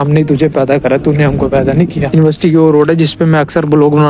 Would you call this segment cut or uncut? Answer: cut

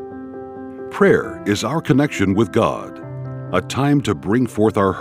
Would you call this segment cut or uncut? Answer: cut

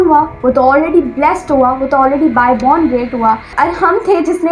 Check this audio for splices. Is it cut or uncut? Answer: cut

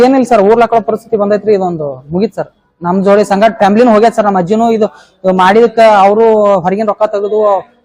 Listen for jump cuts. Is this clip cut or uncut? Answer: uncut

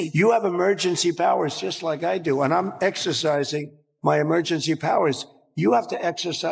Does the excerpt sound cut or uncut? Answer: uncut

